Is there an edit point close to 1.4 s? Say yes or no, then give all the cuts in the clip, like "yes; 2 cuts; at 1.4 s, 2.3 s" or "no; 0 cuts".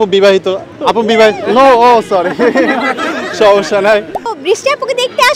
no; 1 cut; at 4.4 s